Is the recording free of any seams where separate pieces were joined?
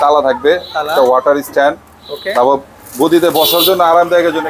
yes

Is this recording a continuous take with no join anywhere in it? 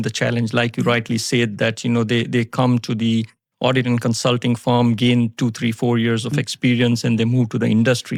yes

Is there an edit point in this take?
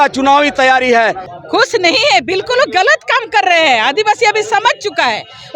yes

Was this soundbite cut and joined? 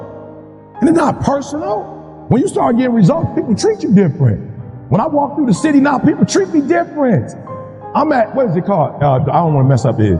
no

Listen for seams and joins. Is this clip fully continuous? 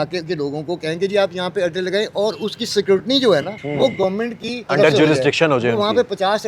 no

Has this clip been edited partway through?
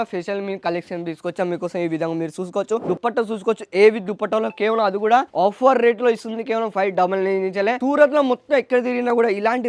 yes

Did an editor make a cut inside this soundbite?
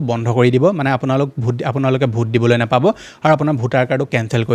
no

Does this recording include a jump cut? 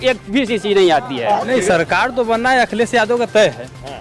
yes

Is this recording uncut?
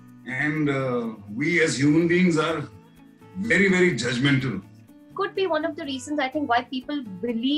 no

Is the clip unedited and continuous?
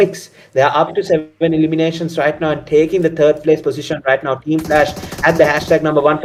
yes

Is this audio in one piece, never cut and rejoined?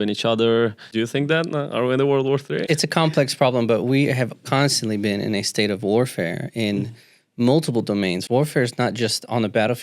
no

